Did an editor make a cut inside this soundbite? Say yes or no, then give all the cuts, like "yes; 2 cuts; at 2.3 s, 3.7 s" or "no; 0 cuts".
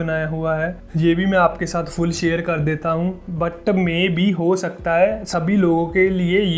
no; 0 cuts